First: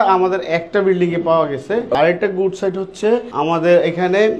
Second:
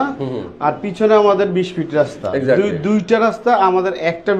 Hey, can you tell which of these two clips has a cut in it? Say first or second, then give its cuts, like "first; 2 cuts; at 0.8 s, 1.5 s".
first; 2 cuts; at 1.9 s, 3.3 s